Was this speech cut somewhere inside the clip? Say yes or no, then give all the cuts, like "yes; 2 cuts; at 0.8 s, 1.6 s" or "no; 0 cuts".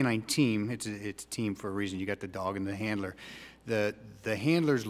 no; 0 cuts